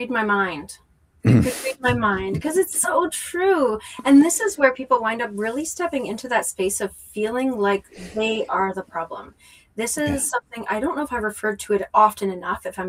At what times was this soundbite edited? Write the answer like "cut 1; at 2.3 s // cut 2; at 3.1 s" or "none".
none